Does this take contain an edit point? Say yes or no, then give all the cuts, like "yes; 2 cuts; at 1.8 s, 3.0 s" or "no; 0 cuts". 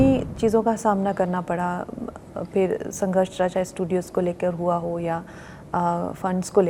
no; 0 cuts